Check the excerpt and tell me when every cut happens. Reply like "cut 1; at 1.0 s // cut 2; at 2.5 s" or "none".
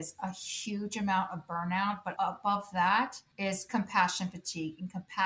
cut 1; at 2.1 s // cut 2; at 3.2 s